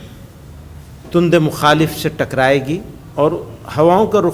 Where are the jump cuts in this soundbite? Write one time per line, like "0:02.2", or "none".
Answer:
0:03.0